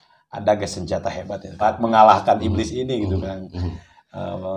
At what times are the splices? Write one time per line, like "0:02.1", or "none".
0:01.6

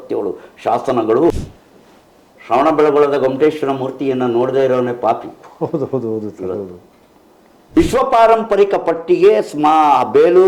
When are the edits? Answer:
0:01.5
0:07.6

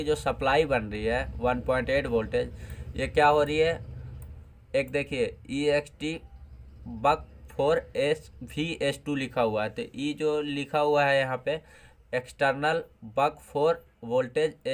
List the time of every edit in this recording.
none

